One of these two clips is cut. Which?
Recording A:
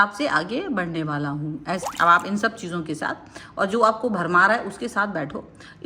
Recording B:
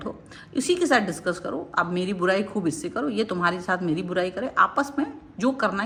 A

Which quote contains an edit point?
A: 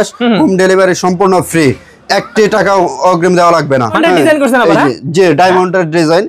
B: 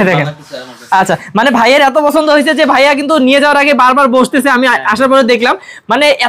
A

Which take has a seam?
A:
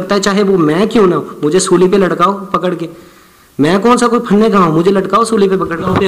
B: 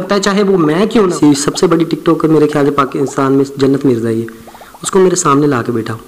B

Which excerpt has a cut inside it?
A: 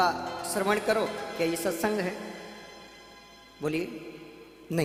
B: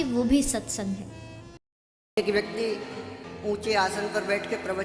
B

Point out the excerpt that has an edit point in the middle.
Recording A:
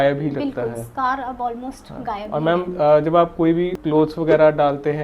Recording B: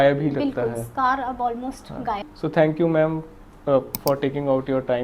B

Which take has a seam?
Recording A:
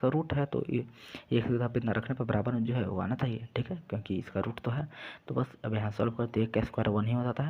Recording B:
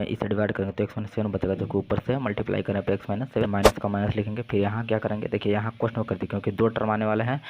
B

